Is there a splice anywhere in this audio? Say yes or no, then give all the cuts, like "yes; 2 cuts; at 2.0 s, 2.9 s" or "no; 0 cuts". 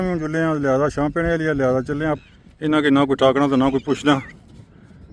yes; 1 cut; at 2.2 s